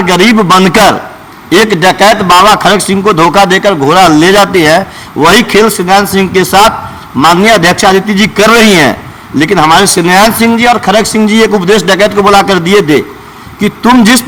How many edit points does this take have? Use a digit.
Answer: 0